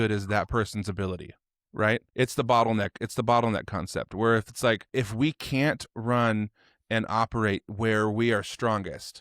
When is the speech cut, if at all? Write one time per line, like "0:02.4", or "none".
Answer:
0:02.1
0:04.8